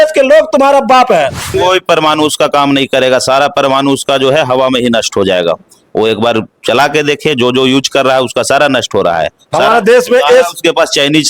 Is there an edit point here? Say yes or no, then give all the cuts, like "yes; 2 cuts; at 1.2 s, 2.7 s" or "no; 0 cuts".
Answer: yes; 1 cut; at 1.5 s